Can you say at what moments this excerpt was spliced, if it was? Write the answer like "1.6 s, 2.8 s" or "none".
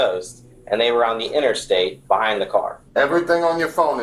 2.8 s

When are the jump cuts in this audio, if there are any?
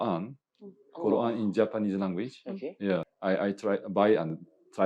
3.1 s

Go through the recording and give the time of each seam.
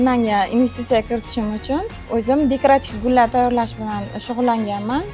2.0 s

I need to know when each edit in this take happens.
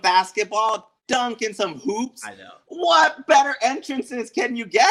none

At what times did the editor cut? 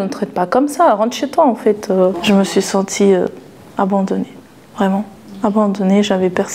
none

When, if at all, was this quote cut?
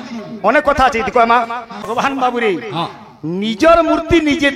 1.8 s

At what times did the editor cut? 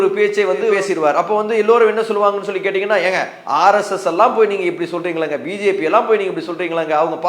3.3 s

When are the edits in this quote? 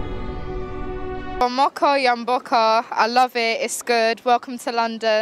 1.4 s

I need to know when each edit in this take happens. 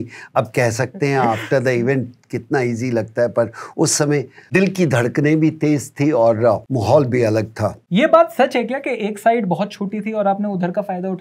4.5 s, 6.7 s, 7.8 s

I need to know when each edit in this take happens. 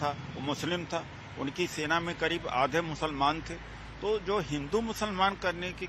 1.2 s

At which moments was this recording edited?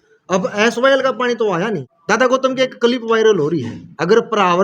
1.9 s, 3.7 s

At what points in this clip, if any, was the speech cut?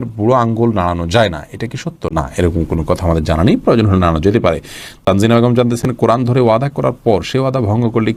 none

